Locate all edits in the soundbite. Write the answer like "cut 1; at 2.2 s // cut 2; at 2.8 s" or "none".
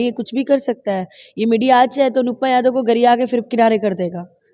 none